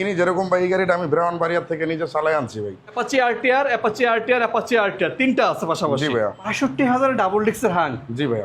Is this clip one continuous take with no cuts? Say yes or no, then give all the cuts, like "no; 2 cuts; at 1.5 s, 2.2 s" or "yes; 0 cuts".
no; 2 cuts; at 2.9 s, 6.5 s